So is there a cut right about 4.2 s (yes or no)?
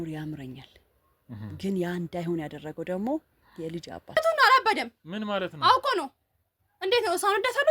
yes